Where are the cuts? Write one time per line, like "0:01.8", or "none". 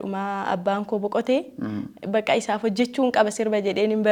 none